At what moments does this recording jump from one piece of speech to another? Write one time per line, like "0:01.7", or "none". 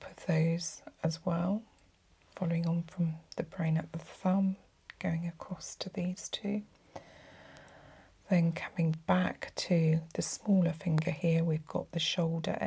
none